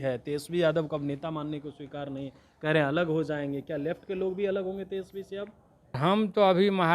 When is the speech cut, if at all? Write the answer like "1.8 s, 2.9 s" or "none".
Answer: 6.0 s